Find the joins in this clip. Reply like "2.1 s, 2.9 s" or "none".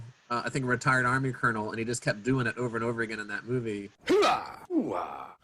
none